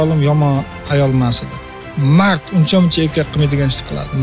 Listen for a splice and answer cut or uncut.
cut